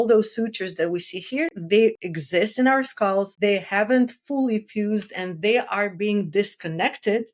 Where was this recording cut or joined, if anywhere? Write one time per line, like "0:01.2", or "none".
0:02.1
0:03.3